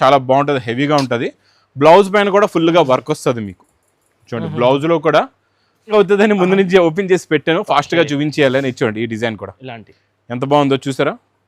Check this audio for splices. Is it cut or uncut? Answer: cut